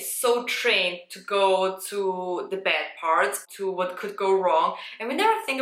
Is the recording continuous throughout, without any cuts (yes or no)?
yes